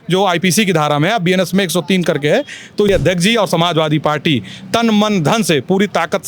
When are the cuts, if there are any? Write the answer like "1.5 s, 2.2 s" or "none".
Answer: 2.9 s